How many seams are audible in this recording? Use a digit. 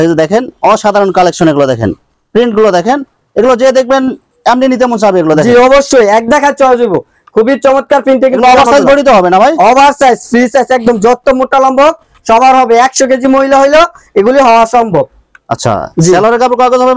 0